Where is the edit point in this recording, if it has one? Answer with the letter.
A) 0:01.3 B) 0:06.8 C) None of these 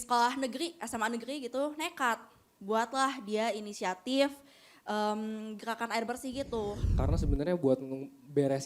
B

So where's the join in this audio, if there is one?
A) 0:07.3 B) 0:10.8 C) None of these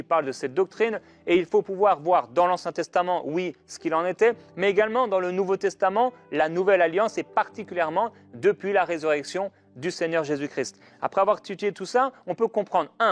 B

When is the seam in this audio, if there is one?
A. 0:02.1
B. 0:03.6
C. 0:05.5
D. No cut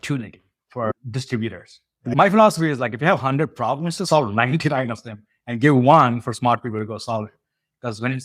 A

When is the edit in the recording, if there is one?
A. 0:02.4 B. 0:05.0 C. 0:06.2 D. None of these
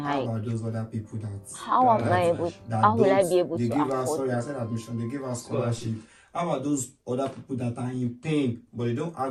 D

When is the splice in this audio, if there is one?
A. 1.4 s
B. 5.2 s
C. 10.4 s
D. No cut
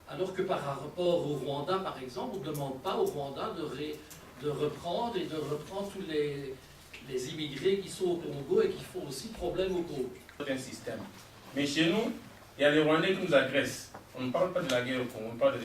C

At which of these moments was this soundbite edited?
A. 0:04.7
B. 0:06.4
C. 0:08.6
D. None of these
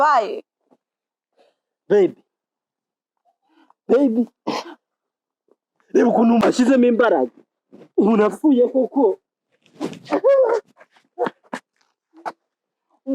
B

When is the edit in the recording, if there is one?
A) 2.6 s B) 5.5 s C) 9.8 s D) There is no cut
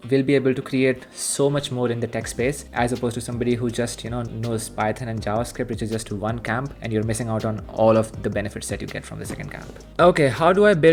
D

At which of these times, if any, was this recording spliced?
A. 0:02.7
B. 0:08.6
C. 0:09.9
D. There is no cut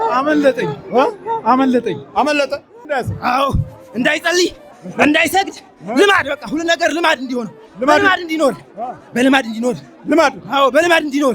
A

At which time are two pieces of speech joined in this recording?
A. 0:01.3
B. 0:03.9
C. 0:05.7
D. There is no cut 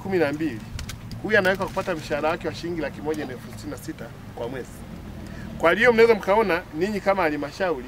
D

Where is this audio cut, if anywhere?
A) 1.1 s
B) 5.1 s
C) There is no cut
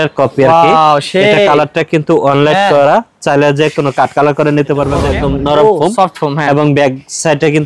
B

